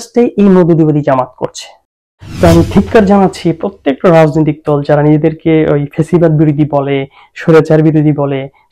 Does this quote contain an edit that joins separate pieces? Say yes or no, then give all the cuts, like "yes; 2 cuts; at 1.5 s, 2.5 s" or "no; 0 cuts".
yes; 1 cut; at 2.2 s